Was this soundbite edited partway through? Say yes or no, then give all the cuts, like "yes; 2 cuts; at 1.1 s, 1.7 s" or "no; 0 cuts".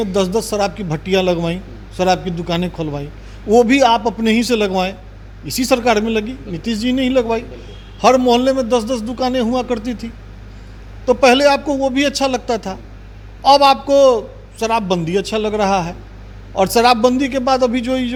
no; 0 cuts